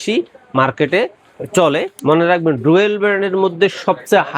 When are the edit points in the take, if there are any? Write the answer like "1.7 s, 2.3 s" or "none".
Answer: 1.9 s